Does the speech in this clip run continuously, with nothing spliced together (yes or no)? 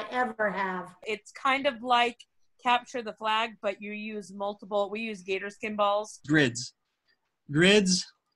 no